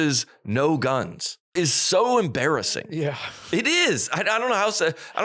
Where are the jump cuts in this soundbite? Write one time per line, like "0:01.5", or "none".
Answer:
0:01.5